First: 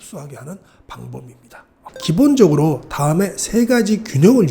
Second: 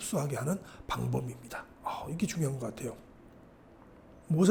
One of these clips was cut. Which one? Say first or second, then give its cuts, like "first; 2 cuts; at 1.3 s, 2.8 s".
first; 1 cut; at 1.9 s